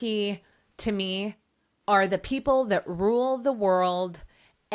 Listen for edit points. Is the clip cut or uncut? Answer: uncut